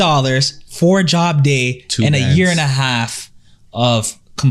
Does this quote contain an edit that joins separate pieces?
no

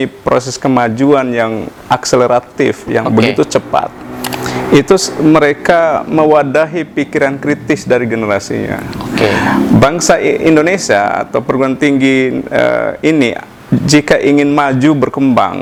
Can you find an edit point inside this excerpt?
no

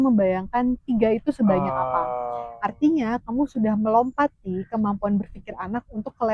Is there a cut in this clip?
no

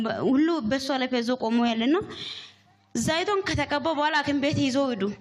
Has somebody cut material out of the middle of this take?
no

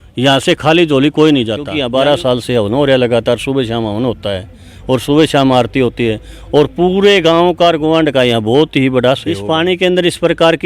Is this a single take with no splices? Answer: no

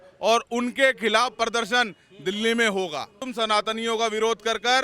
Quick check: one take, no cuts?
no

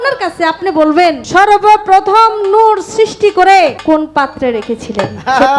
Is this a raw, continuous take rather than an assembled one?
no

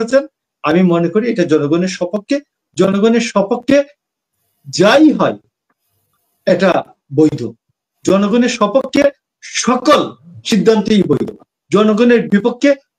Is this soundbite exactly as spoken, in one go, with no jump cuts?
yes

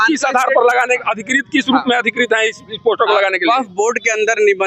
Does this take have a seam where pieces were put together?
no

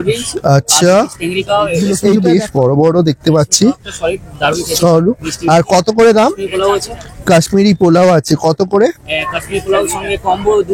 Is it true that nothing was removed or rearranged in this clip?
no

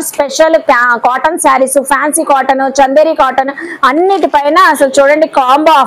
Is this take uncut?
yes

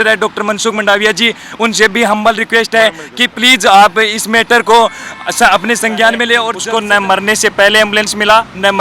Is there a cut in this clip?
yes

